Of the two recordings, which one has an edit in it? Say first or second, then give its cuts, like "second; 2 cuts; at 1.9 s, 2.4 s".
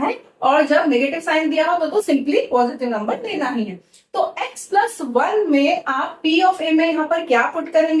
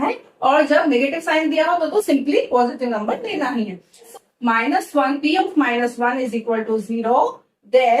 second; 1 cut; at 4.1 s